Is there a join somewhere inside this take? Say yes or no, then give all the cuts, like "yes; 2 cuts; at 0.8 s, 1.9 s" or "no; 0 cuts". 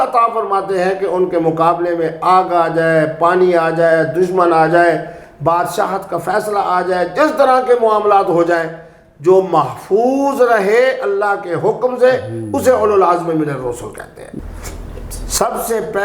yes; 1 cut; at 14.3 s